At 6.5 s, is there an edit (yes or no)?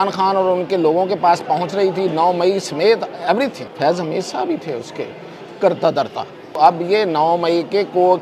yes